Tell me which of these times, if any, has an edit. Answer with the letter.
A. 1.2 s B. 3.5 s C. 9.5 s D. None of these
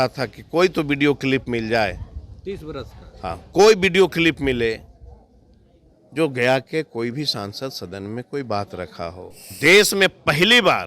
C